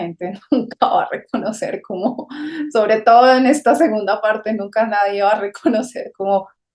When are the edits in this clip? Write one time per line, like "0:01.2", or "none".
none